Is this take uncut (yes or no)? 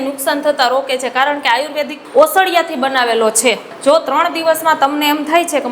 no